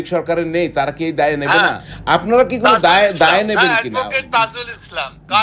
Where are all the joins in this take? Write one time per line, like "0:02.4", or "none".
0:01.8